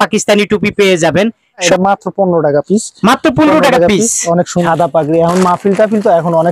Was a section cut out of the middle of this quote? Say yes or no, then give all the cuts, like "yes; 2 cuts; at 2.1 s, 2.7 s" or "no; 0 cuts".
yes; 2 cuts; at 1.6 s, 4.6 s